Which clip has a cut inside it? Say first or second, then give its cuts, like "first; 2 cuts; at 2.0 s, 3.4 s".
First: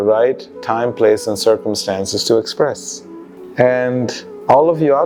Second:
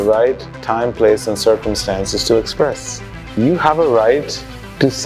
second; 1 cut; at 3.4 s